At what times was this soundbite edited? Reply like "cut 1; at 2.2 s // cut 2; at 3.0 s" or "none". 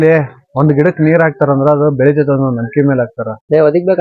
none